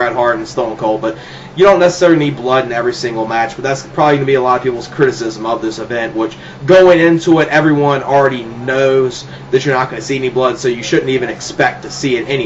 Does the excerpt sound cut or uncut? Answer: cut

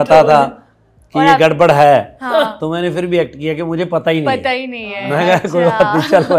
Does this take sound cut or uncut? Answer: uncut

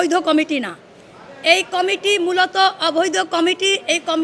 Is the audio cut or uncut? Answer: uncut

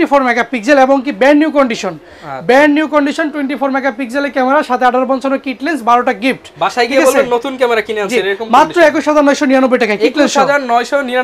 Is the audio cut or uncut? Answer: uncut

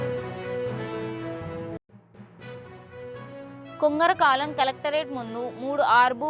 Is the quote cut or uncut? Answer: cut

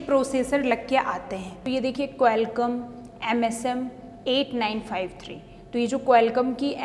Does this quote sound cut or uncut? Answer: cut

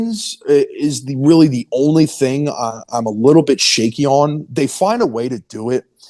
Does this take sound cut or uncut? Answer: uncut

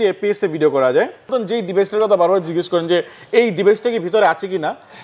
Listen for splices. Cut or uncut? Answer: cut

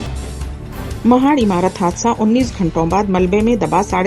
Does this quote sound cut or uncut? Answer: cut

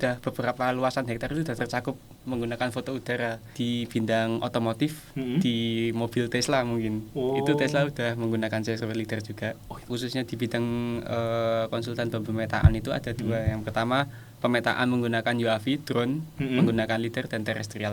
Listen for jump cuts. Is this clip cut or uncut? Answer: cut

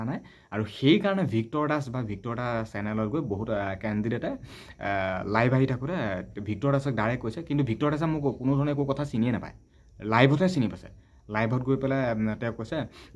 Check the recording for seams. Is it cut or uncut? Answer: uncut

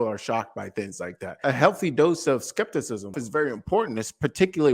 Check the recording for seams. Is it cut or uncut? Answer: cut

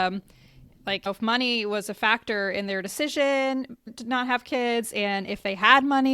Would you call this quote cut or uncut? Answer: cut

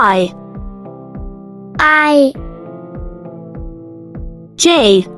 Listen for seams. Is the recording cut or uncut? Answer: uncut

